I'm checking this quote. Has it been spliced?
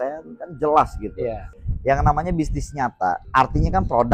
yes; 2 cuts; at 1.5 s, 3.2 s

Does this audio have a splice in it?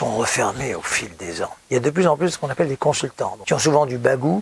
yes; 2 cuts; at 1.5 s, 3.4 s

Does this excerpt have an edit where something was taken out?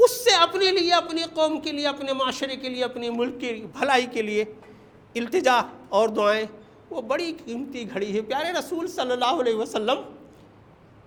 no; 0 cuts

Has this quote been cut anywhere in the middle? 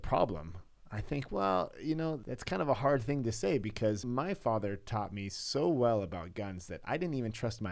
yes; 2 cuts; at 2.3 s, 4.0 s

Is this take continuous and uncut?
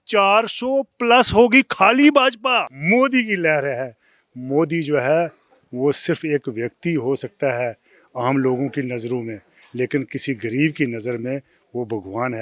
no; 1 cut; at 2.7 s

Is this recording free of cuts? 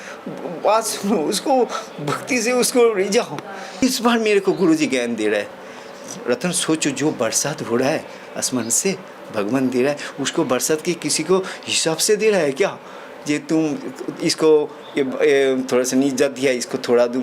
no; 1 cut; at 3.8 s

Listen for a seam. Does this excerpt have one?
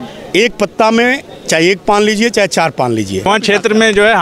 yes; 1 cut; at 3.3 s

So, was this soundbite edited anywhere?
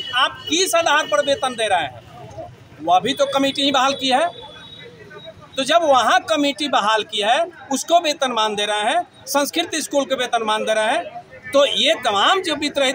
no; 0 cuts

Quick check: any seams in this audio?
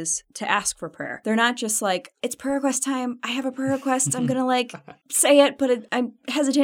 yes; 2 cuts; at 1.1 s, 2.2 s

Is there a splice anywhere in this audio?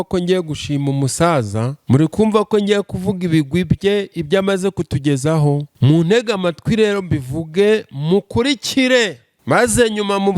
yes; 3 cuts; at 1.7 s, 5.7 s, 9.3 s

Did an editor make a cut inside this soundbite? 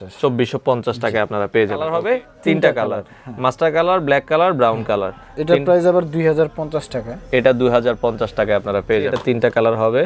yes; 2 cuts; at 1.9 s, 9.1 s

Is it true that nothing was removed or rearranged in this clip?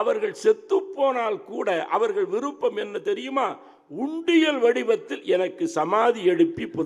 yes; 0 cuts

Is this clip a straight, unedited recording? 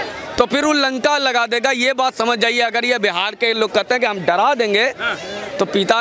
yes; 0 cuts

